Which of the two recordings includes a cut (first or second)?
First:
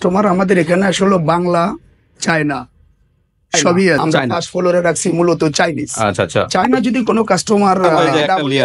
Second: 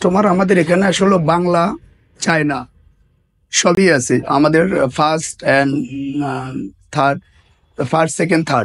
first